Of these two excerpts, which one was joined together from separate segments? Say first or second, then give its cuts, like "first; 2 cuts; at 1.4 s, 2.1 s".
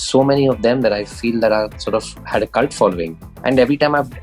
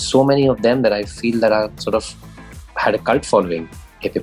first; 2 cuts; at 2.2 s, 3.2 s